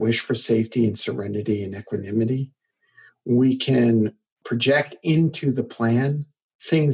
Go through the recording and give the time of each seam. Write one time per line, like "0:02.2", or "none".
0:04.3